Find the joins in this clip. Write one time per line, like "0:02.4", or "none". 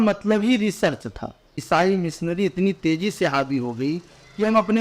0:01.6